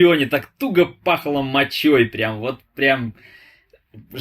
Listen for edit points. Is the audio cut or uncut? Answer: uncut